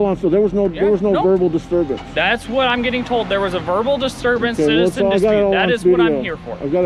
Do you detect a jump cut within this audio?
no; 0 cuts

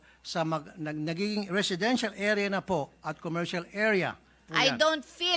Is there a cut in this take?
yes; 1 cut; at 4.4 s

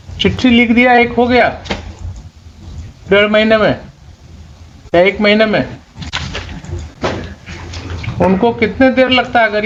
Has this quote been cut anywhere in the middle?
no; 0 cuts

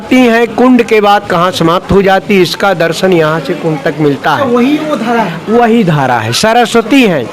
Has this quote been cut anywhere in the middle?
no; 0 cuts

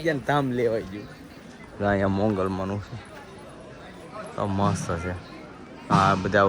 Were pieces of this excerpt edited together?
no; 0 cuts

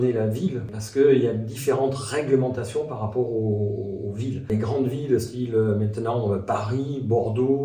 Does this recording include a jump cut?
no; 0 cuts

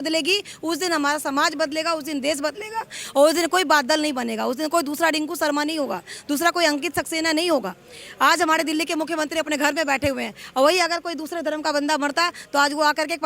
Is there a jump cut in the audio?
no; 0 cuts

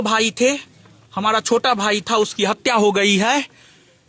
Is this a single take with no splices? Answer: yes; 0 cuts

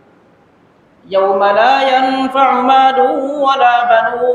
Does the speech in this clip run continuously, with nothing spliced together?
yes; 0 cuts

